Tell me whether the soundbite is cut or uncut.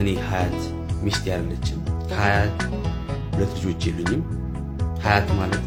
uncut